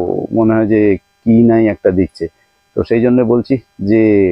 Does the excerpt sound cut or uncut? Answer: uncut